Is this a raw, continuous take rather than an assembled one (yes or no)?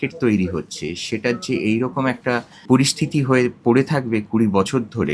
no